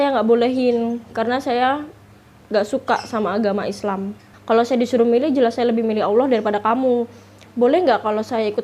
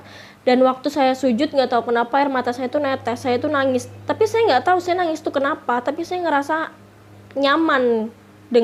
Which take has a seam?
first; 2 cuts; at 4.3 s, 7.4 s

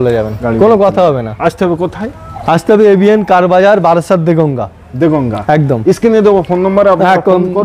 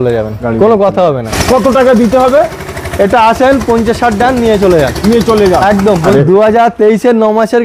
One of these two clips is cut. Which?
second; 2 cuts; at 1.3 s, 6.1 s

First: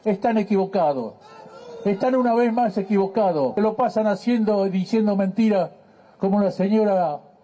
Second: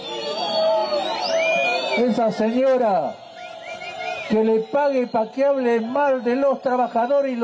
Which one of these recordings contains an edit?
first; 1 cut; at 3.5 s

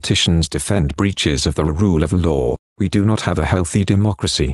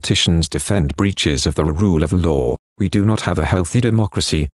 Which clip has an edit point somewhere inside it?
first; 1 cut; at 3.6 s

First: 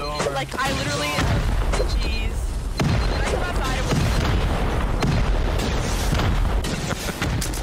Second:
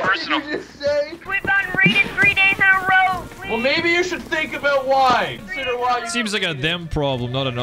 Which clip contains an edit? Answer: second; 2 cuts; at 1.2 s, 5.5 s

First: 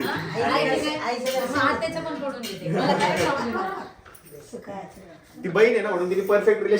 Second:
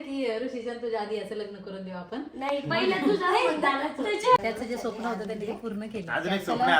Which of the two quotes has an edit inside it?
second; 1 cut; at 4.4 s

